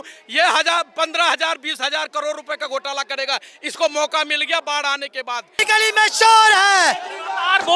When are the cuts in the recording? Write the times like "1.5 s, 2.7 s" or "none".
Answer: 5.5 s